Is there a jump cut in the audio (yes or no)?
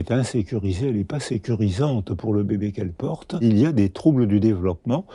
yes